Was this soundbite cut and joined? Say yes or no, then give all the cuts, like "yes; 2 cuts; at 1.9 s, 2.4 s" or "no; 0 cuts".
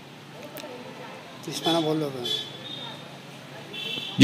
yes; 1 cut; at 0.9 s